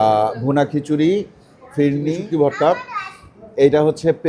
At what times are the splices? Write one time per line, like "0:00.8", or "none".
0:02.2